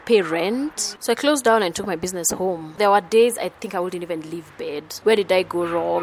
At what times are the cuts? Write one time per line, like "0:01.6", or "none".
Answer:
0:00.9
0:02.8
0:04.8